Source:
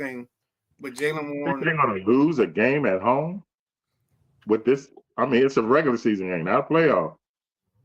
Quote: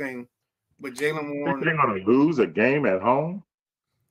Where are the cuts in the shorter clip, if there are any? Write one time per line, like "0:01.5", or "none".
none